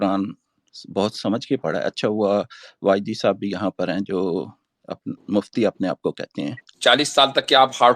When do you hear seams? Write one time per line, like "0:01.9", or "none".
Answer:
0:06.6

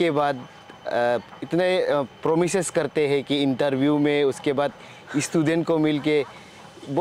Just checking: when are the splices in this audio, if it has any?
none

